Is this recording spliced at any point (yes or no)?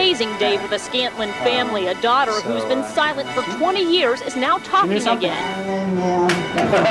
yes